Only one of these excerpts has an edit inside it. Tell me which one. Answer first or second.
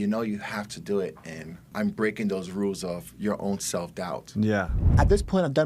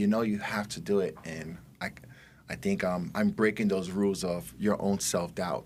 first